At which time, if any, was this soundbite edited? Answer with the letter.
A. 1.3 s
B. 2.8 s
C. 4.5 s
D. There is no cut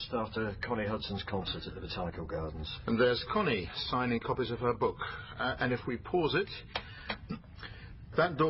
C